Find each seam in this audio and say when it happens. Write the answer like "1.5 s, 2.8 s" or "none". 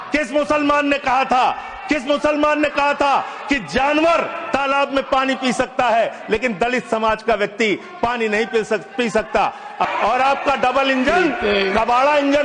9.9 s